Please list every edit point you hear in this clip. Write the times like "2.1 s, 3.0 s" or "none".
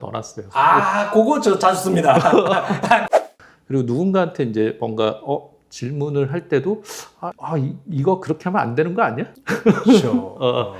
3.1 s